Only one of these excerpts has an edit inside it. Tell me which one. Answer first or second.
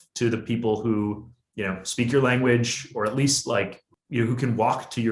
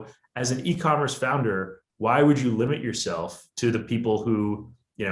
first